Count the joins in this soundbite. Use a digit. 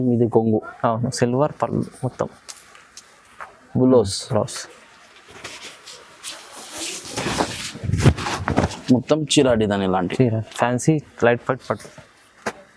0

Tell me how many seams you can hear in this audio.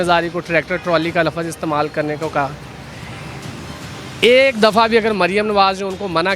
0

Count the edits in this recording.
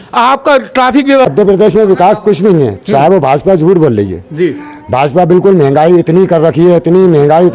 1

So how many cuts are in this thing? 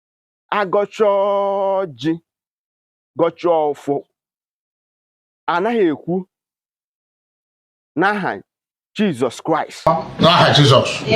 1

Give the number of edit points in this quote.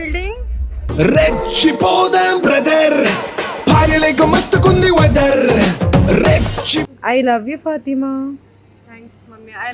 1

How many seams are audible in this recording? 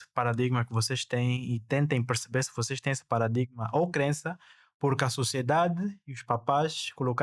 0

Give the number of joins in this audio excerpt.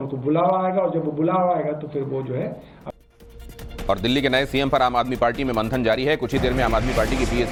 0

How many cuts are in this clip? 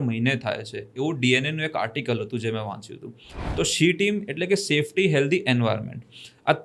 1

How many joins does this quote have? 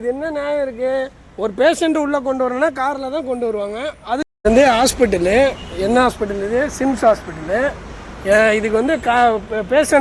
1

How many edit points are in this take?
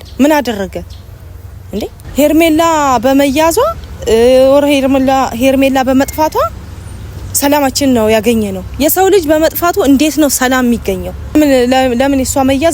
2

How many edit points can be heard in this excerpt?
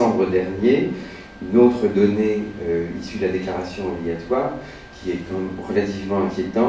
0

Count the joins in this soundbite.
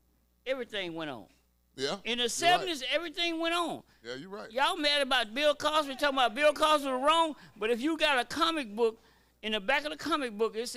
0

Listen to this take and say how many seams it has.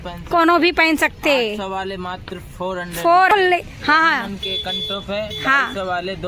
1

